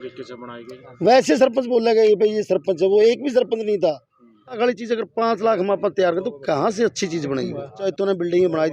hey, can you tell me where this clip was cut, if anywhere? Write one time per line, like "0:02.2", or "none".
0:04.6
0:07.9